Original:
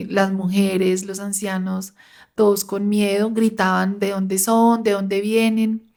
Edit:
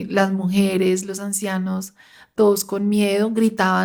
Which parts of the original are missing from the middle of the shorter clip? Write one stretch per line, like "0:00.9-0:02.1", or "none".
none